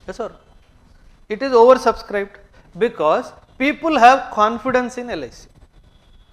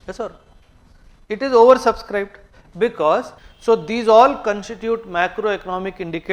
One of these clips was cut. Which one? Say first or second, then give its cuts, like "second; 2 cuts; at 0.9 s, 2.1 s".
second; 1 cut; at 3.4 s